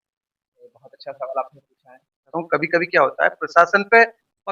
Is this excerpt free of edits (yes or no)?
no